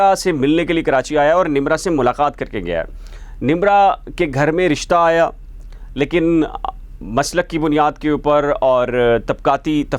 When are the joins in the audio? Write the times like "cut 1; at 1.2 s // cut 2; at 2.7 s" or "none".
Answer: none